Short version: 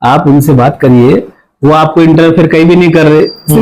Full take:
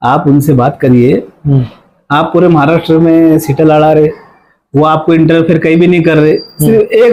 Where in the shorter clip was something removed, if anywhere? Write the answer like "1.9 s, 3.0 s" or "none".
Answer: 1.4 s